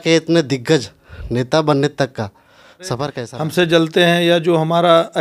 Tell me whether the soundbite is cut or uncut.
cut